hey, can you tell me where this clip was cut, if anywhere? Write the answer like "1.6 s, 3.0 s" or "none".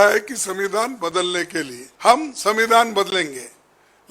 1.8 s

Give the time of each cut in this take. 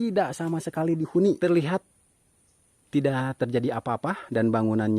1.4 s

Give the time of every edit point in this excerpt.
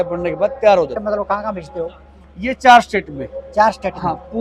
1.0 s

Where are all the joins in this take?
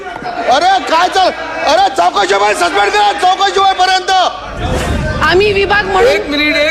4.9 s

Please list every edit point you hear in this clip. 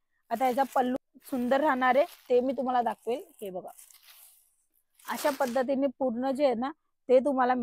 1.2 s

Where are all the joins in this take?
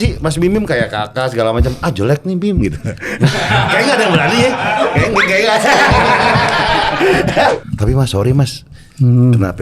7.5 s

